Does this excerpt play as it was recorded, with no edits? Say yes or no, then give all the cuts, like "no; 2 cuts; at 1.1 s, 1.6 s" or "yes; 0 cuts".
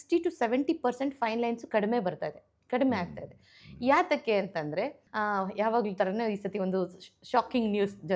no; 1 cut; at 5.0 s